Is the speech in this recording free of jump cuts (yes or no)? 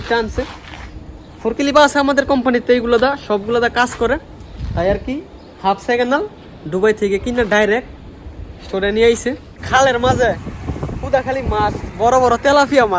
no